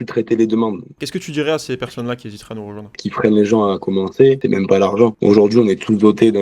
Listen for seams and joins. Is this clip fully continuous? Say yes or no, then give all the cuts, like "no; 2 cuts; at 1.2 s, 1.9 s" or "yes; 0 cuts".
no; 2 cuts; at 1.0 s, 3.0 s